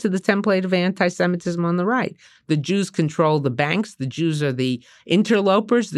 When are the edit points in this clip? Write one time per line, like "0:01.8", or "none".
none